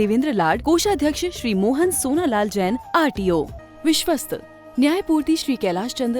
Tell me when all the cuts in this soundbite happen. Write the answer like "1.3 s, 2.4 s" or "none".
3.6 s